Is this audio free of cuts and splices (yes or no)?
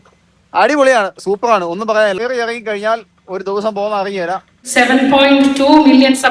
no